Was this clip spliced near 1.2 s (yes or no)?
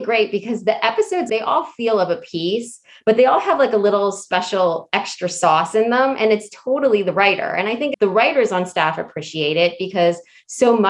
yes